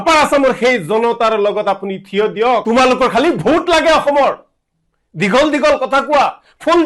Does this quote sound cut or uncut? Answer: cut